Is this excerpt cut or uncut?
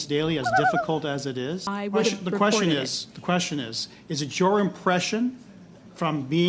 cut